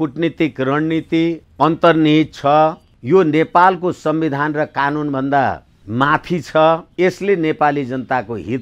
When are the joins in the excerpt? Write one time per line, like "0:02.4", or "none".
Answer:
0:01.5
0:02.9
0:05.7
0:06.9